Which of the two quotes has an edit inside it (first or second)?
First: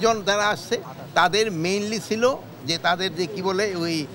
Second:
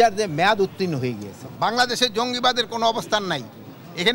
second